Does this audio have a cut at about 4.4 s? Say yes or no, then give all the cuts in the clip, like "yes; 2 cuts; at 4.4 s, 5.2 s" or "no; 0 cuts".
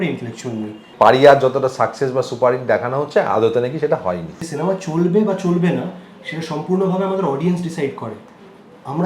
yes; 2 cuts; at 0.9 s, 4.4 s